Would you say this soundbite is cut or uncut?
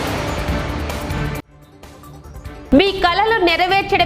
cut